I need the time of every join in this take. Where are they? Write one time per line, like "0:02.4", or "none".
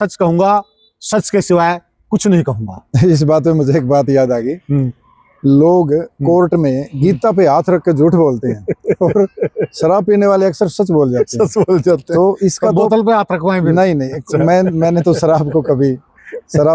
none

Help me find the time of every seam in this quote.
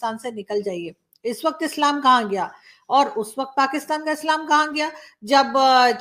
none

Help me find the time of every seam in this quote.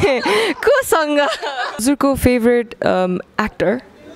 0:01.8

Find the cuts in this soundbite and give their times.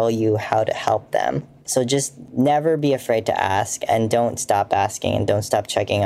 0:01.8

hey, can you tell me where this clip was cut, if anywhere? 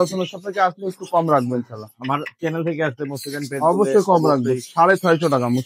none

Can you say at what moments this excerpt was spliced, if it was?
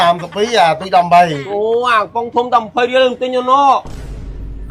none

